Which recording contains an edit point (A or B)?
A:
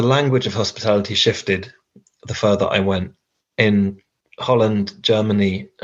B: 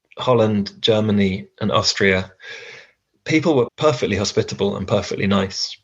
B